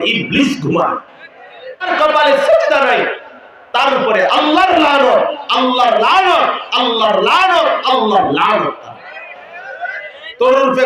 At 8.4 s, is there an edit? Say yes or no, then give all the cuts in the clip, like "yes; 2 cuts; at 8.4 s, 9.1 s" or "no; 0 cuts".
no; 1 cut; at 1.9 s